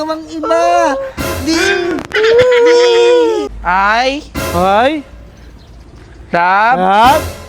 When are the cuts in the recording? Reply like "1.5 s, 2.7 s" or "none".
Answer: 3.5 s